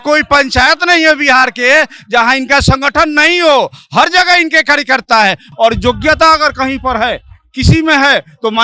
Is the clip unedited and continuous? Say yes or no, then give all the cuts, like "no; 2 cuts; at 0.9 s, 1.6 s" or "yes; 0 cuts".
no; 1 cut; at 5.4 s